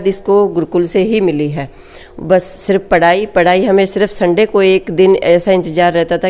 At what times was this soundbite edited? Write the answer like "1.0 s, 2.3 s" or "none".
none